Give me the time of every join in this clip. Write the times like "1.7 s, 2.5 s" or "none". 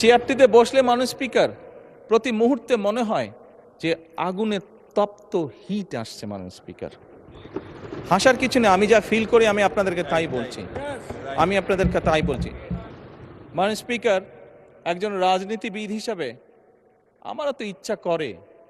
12.8 s

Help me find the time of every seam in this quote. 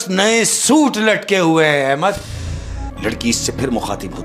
2.9 s

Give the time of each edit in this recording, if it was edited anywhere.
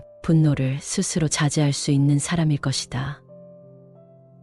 3.5 s

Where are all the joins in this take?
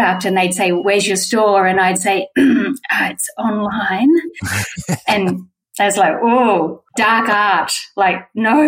0.8 s, 6.8 s

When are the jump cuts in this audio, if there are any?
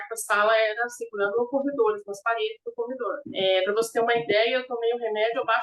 3.2 s

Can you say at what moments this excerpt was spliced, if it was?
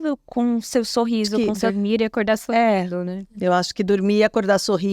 1.3 s

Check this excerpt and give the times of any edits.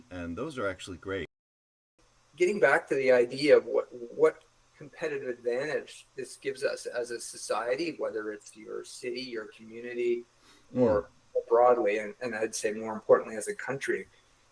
1.8 s

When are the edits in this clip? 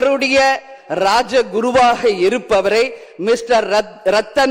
none

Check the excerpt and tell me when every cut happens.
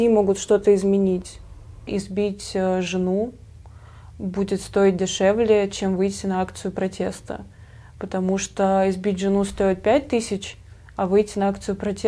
1.9 s

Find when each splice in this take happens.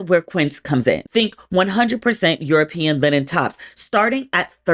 1.0 s

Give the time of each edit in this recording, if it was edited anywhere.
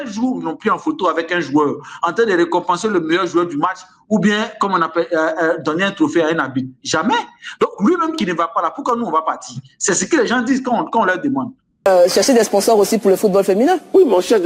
11.9 s

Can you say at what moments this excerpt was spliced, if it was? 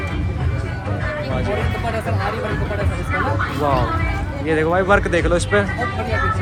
none

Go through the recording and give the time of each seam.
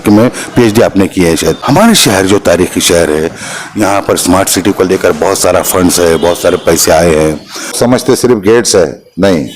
1.6 s, 7.8 s

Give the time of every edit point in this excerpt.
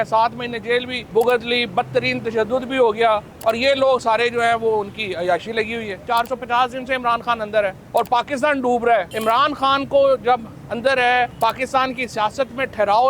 1.0 s, 3.3 s, 6.0 s, 7.8 s, 9.1 s, 11.3 s

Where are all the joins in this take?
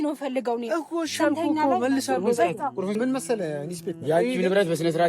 3.0 s

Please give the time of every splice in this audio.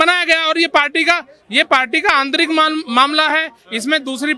none

